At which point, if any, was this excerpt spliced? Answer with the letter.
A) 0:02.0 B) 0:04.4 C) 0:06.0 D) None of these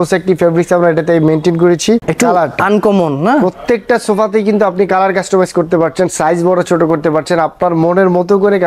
A